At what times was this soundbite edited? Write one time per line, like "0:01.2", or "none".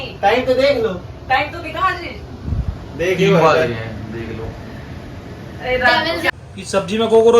0:06.3